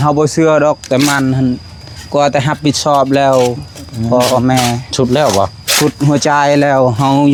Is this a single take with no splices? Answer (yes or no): yes